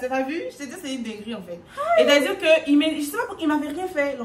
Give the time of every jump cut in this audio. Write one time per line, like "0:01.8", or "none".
none

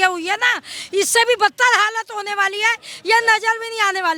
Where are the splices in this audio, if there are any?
none

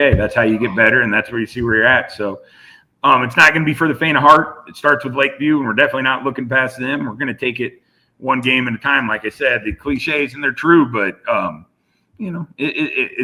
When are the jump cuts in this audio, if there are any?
none

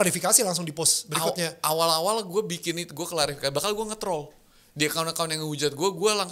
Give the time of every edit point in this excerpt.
none

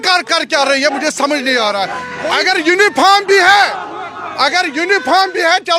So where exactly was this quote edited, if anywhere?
0:02.0

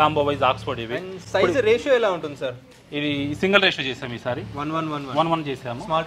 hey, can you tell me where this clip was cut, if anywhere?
none

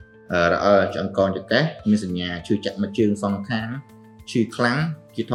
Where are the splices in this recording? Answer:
none

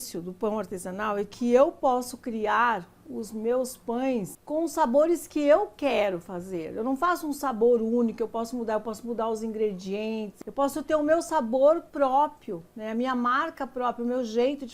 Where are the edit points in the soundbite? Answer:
0:04.4
0:10.3

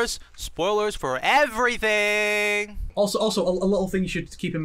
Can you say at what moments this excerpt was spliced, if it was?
0:02.8

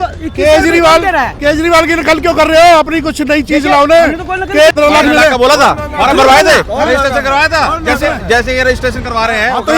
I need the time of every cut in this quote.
0:04.7

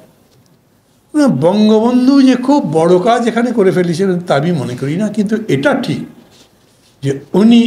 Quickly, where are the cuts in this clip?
none

